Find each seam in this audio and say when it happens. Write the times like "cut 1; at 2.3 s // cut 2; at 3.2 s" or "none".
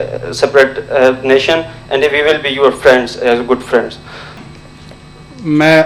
cut 1; at 4.4 s

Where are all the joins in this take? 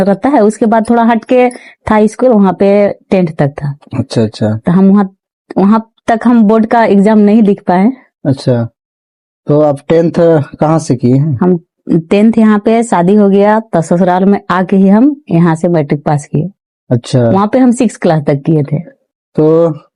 none

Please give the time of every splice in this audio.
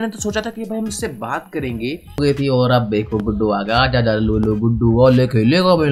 cut 1; at 2.2 s

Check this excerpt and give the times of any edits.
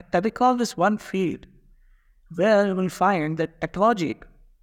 none

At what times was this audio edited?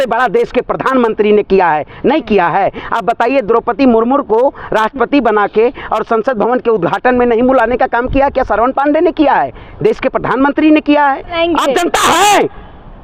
cut 1; at 11.3 s

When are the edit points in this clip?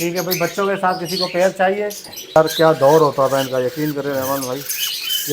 cut 1; at 2.4 s

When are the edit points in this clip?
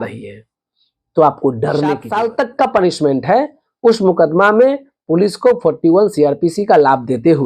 cut 1; at 2.1 s

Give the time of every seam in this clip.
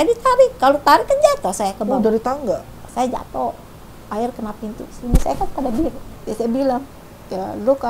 cut 1; at 2.8 s // cut 2; at 6.1 s

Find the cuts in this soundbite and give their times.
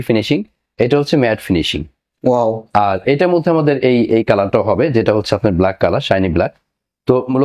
none

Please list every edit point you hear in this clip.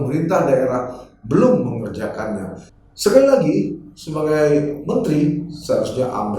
cut 1; at 2.6 s

